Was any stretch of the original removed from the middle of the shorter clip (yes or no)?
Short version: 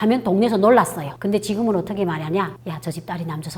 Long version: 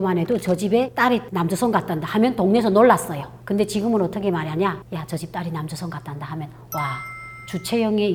yes